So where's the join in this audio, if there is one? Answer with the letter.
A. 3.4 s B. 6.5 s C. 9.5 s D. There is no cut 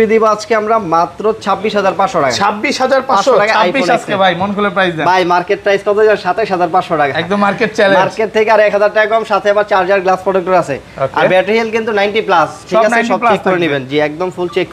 D